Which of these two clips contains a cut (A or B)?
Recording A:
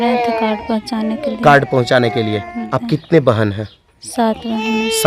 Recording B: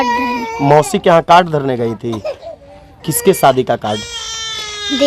A